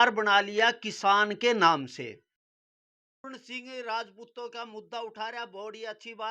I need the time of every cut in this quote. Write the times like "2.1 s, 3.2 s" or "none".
2.7 s

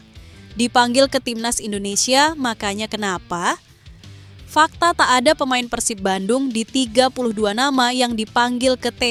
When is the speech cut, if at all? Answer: none

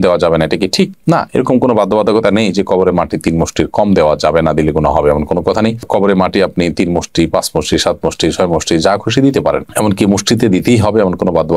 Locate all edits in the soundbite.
none

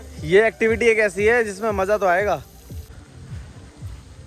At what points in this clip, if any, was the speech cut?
2.9 s

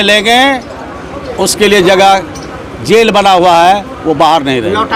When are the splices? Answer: none

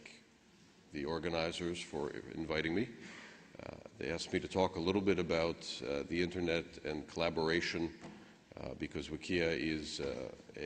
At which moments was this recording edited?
5.0 s

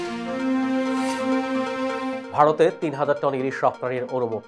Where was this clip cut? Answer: none

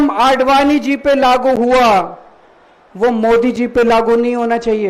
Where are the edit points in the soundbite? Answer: none

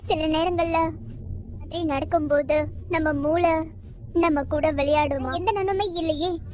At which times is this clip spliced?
none

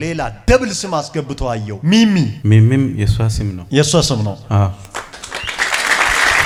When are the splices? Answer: none

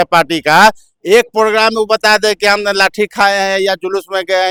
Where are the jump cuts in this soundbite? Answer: none

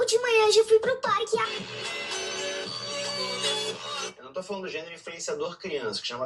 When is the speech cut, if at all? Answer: none

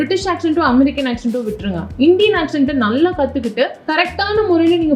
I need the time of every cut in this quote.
3.8 s

